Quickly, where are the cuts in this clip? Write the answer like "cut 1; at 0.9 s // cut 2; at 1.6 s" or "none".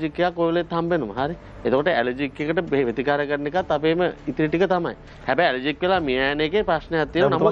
none